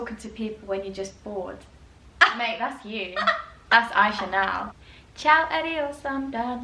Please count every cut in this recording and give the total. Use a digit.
1